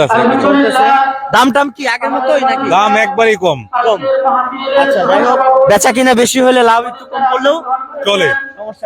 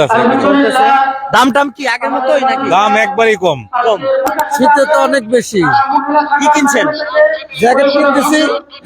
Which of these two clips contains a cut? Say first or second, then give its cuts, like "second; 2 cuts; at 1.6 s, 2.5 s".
second; 1 cut; at 4.3 s